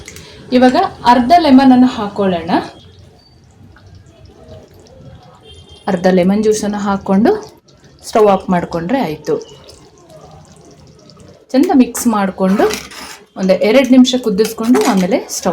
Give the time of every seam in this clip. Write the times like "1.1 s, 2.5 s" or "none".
2.8 s, 11.4 s